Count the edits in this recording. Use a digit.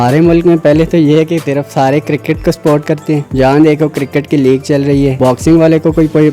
2